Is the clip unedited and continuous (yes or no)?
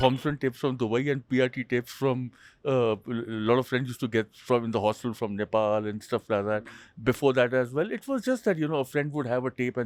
yes